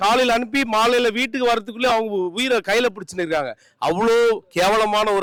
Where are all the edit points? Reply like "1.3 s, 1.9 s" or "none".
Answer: none